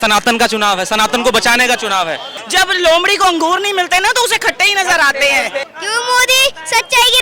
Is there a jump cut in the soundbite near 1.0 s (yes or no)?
no